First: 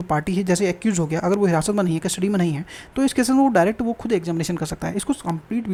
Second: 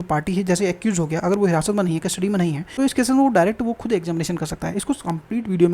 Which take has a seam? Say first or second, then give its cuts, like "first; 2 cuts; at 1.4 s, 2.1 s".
second; 1 cut; at 2.6 s